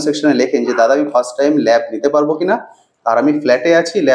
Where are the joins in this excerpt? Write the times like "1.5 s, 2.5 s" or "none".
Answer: none